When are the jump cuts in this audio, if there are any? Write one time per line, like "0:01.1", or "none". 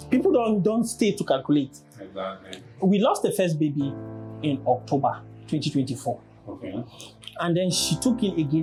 none